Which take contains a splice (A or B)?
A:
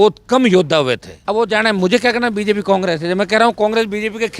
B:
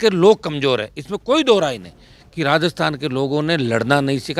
A